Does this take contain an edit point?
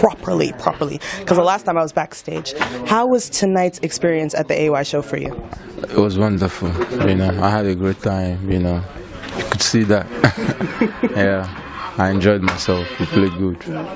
yes; 1 cut; at 12.2 s

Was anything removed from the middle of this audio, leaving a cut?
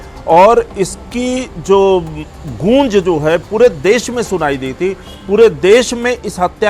no; 0 cuts

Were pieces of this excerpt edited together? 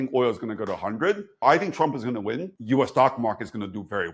yes; 2 cuts; at 1.4 s, 2.5 s

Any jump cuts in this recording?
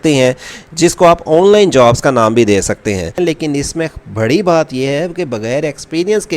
yes; 1 cut; at 3.1 s

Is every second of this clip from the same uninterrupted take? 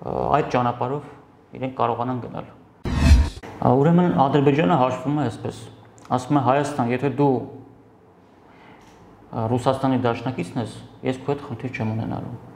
no; 1 cut; at 3.1 s

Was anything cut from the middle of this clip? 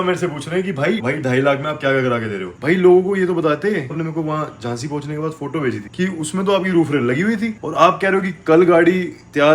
yes; 4 cuts; at 1.0 s, 2.5 s, 3.9 s, 5.9 s

